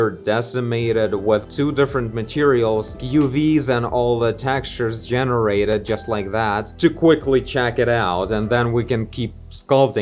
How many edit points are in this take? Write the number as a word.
zero